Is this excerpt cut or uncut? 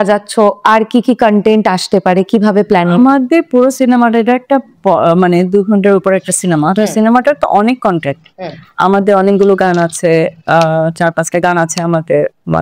uncut